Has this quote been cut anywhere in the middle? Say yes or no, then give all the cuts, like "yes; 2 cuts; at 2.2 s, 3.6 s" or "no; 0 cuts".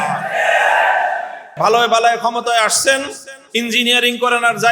yes; 1 cut; at 1.5 s